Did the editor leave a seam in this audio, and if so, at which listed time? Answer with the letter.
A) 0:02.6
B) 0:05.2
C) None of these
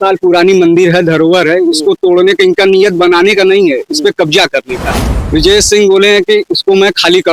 B